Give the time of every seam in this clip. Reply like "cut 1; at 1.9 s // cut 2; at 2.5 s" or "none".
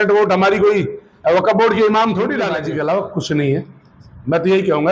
cut 1; at 2.5 s